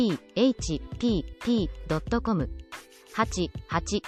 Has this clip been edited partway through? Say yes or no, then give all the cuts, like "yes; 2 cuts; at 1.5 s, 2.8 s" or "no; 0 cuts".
no; 0 cuts